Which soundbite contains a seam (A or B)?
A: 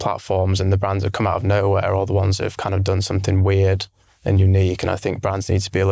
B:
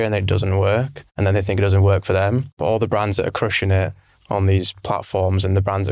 B